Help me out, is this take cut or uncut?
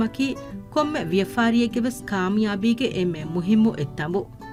uncut